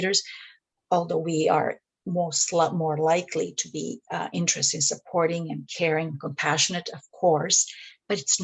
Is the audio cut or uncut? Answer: uncut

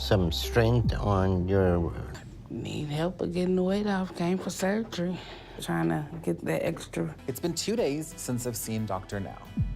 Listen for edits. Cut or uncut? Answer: cut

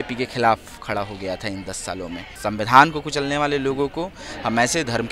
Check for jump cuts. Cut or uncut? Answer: cut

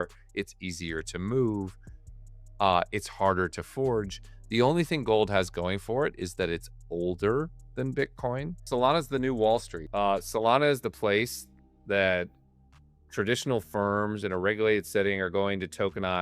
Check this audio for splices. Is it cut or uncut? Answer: cut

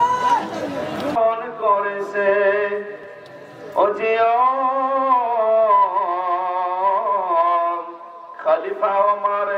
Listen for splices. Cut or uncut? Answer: cut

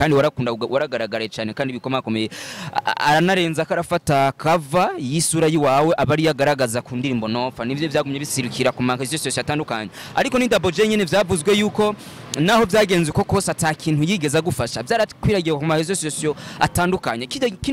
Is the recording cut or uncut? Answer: uncut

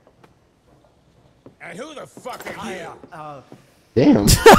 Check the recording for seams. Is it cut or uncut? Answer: uncut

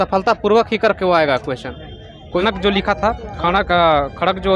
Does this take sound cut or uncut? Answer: cut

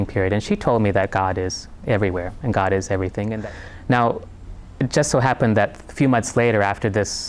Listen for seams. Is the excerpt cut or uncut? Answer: cut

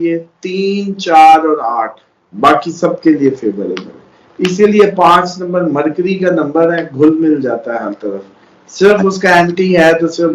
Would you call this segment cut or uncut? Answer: cut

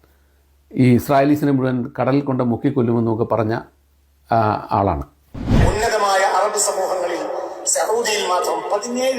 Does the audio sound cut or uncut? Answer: cut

